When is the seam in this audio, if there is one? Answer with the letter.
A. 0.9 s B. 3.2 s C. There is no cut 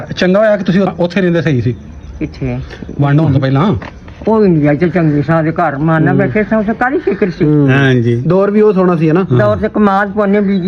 A